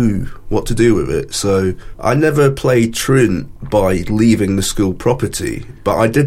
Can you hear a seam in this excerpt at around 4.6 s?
no; 1 cut; at 1.9 s

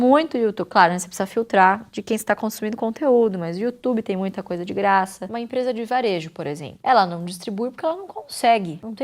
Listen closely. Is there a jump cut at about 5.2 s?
yes; 1 cut; at 5.2 s

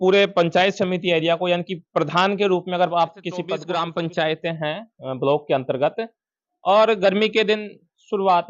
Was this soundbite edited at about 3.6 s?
yes; 1 cut; at 3.6 s

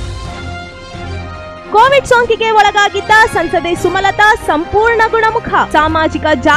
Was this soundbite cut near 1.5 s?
yes; 1 cut; at 1.5 s

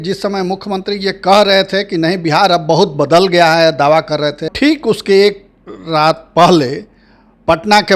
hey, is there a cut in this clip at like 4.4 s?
yes; 1 cut; at 4.4 s

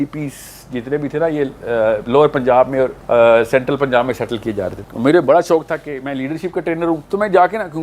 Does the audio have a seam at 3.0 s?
yes; 3 cuts; at 3.0 s, 4.8 s, 7.0 s

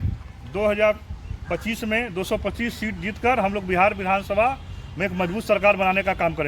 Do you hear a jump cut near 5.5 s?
no; 0 cuts

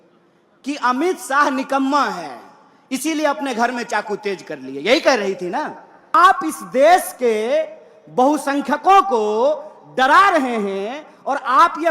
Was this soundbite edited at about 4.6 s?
no; 1 cut; at 6.2 s

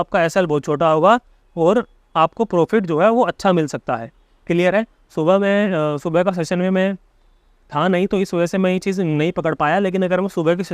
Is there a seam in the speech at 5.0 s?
no; 0 cuts

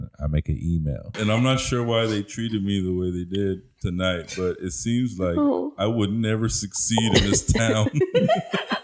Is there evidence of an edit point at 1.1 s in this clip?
yes; 1 cut; at 1.1 s

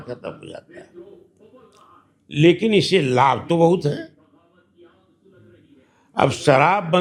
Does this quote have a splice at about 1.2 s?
no; 0 cuts

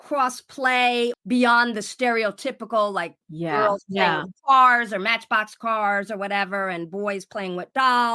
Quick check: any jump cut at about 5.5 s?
no; 2 cuts; at 1.1 s, 3.2 s

